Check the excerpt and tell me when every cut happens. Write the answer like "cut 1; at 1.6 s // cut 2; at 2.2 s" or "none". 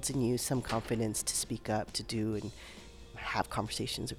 cut 1; at 3.1 s